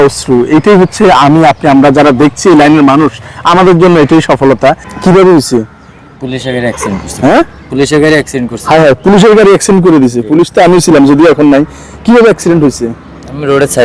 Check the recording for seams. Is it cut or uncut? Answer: cut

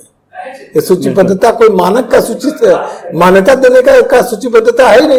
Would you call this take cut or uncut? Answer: uncut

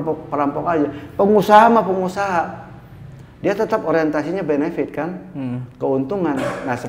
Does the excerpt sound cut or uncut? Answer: uncut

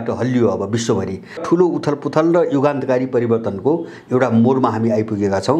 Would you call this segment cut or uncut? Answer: cut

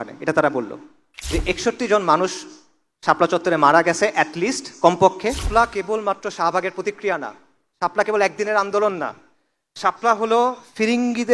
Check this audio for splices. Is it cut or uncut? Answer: cut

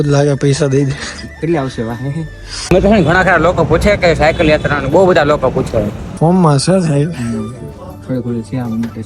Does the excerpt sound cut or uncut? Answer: cut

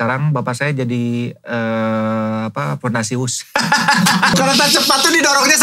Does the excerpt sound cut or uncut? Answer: cut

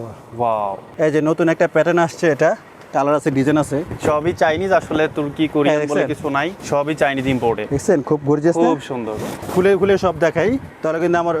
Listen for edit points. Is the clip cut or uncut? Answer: cut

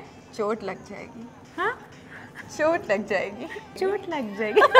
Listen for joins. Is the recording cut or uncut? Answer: cut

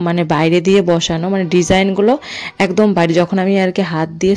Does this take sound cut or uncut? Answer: uncut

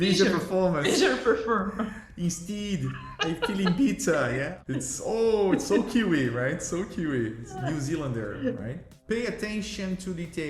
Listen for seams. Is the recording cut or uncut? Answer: cut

